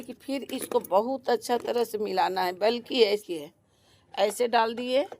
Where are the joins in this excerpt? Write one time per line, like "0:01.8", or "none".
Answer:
0:03.3

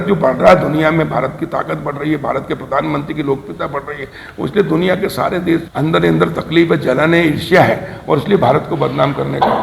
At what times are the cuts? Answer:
0:05.7

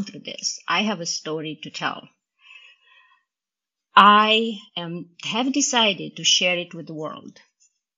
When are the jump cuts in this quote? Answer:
none

